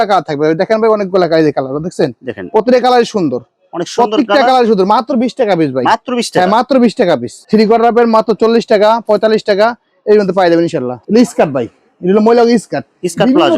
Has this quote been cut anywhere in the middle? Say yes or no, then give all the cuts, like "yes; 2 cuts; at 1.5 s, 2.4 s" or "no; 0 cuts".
yes; 1 cut; at 10.9 s